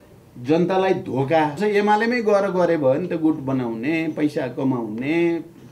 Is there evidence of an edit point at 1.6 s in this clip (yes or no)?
yes